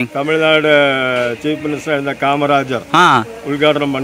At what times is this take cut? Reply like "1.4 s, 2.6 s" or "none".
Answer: none